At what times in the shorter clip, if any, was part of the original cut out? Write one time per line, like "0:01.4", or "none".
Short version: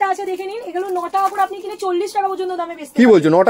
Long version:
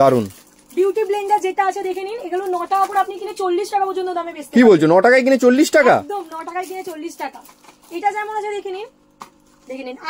none